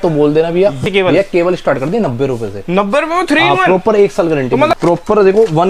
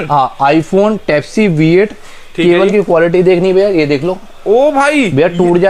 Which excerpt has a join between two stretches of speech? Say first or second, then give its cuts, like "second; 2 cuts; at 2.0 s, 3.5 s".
first; 2 cuts; at 0.8 s, 4.7 s